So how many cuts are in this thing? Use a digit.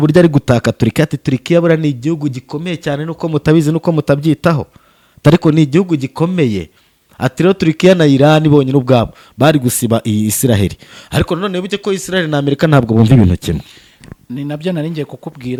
0